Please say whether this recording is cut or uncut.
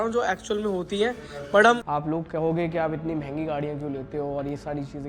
cut